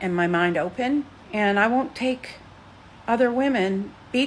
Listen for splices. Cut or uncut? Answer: cut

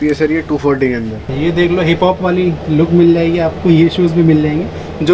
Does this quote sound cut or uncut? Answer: cut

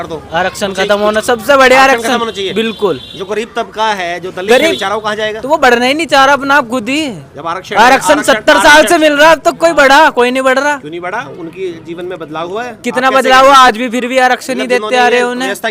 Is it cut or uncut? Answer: uncut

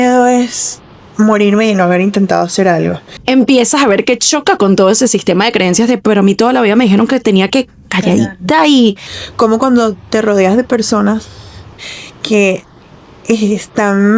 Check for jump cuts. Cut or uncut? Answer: cut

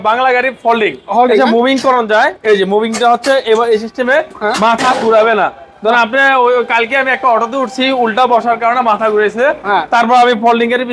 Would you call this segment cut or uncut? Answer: uncut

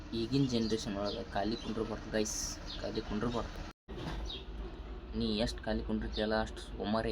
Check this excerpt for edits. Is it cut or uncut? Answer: uncut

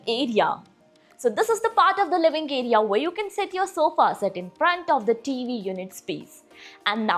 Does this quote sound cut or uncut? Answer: uncut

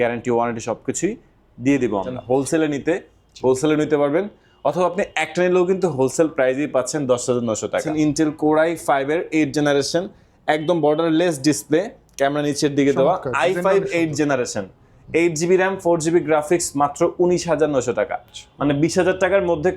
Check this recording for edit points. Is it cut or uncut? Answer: cut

